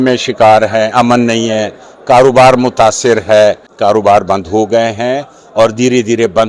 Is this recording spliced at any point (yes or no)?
yes